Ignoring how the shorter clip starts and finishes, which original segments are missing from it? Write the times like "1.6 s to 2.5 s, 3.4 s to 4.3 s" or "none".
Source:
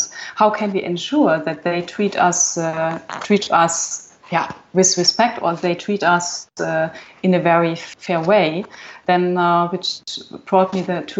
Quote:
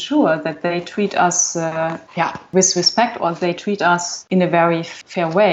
3.2 s to 4.4 s, 6.4 s to 7.1 s